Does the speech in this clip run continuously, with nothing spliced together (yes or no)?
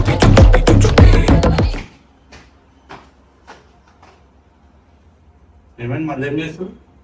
yes